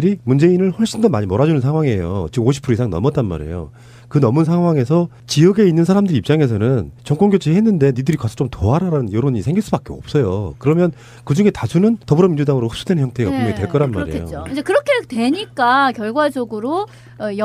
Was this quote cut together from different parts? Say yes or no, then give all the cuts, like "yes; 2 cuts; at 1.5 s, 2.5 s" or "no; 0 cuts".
yes; 1 cut; at 11.6 s